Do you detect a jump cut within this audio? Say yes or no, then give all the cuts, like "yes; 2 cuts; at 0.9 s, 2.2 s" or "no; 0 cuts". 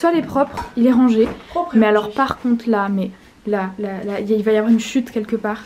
no; 0 cuts